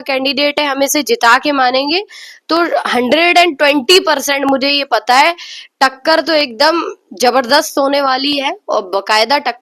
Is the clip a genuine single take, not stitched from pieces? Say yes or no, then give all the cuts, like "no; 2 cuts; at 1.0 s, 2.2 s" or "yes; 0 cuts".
yes; 0 cuts